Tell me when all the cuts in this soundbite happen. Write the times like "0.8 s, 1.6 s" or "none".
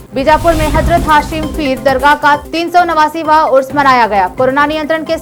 none